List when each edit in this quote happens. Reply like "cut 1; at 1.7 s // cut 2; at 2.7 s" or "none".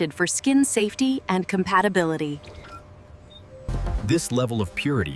cut 1; at 3.7 s

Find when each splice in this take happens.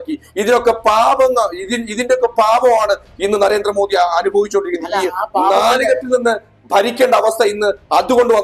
none

